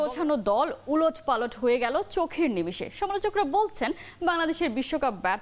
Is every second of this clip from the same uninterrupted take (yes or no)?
yes